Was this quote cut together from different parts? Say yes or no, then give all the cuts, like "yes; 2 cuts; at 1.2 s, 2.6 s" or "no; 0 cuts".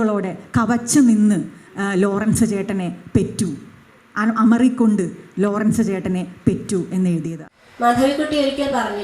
yes; 1 cut; at 7.4 s